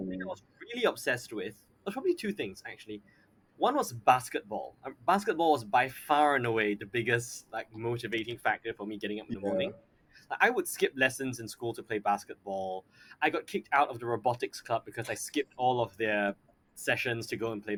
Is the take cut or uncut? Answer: uncut